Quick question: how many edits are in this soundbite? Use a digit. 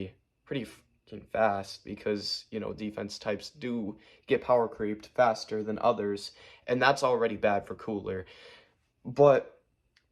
0